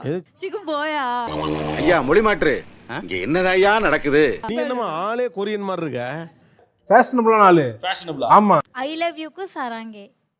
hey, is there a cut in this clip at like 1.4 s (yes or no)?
no